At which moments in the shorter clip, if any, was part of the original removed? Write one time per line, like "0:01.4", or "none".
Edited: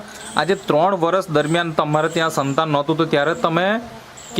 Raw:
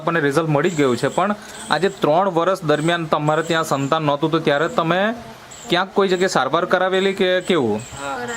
none